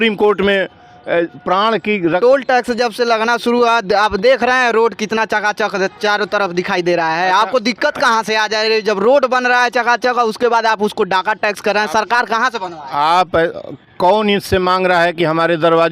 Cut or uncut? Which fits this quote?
cut